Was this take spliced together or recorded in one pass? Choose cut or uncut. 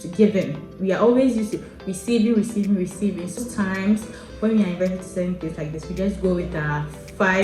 cut